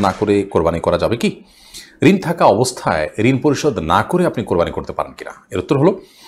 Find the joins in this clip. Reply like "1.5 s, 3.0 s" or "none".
none